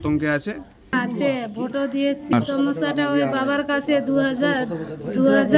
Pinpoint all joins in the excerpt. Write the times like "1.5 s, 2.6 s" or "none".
0.9 s, 2.3 s